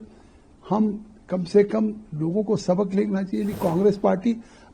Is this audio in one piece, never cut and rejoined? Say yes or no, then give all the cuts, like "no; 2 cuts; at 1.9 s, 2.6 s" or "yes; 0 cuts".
no; 1 cut; at 3.5 s